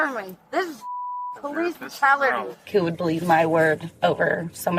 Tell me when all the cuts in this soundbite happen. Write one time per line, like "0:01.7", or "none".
0:02.7
0:03.9